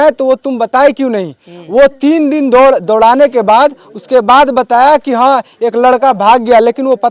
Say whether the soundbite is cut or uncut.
uncut